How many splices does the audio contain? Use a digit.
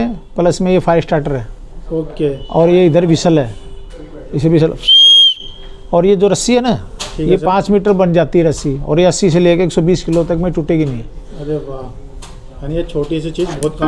0